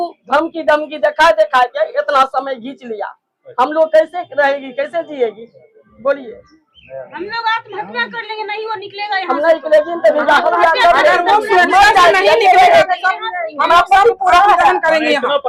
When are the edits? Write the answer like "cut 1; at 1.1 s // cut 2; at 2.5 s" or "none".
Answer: none